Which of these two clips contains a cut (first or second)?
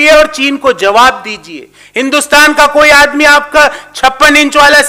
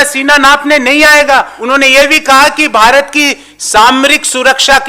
second